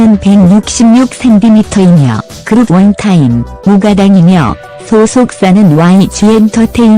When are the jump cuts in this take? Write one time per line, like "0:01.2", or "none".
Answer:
0:01.8